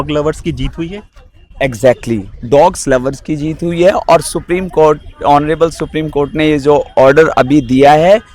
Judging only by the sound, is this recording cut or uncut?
uncut